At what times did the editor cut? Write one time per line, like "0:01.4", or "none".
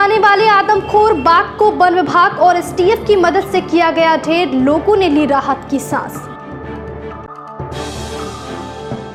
none